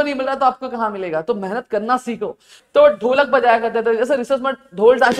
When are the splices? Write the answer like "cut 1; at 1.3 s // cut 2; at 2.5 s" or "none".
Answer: cut 1; at 2.5 s